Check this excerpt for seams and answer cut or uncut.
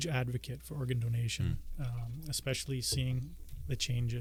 uncut